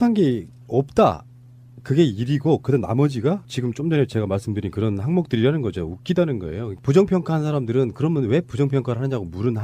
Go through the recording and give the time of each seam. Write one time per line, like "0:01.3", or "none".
0:05.3